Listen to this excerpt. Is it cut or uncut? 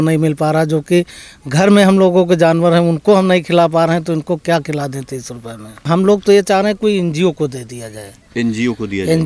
cut